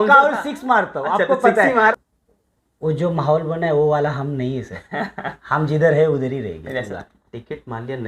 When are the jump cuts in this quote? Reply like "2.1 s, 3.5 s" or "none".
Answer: 1.9 s, 6.9 s